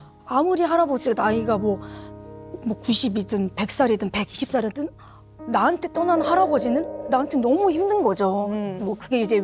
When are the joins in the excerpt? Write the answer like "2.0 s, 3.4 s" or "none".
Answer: none